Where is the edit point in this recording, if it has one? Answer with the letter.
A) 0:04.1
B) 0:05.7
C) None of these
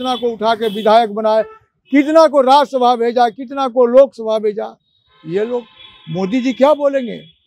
C